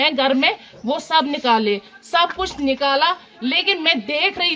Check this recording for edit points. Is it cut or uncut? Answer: uncut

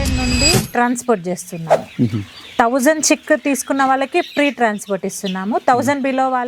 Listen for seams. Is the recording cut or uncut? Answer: uncut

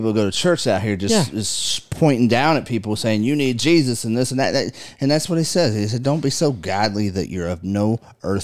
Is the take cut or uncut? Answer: uncut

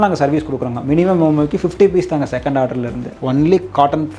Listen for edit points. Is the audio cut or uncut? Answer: cut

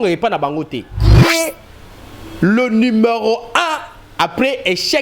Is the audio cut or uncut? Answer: cut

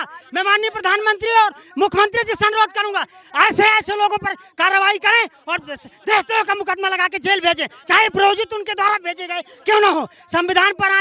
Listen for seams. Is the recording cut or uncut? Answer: uncut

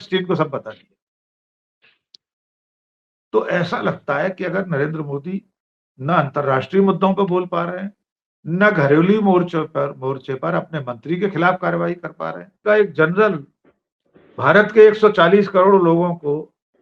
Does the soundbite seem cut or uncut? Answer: cut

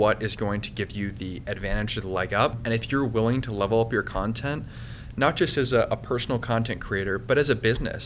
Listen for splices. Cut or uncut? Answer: cut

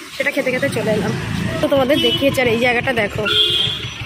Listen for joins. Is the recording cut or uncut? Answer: cut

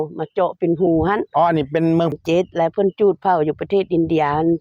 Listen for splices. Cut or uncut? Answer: cut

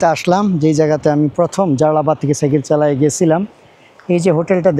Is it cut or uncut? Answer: uncut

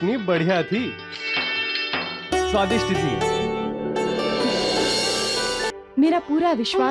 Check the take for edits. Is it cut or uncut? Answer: cut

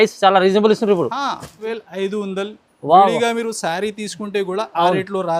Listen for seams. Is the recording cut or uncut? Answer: cut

